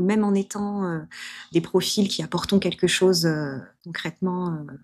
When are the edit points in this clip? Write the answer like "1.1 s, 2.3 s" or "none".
none